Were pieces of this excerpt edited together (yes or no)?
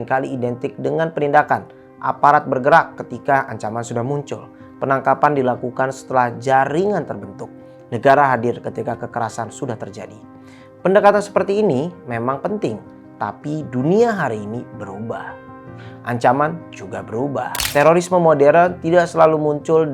yes